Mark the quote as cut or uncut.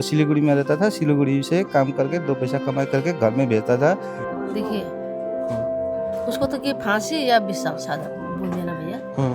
cut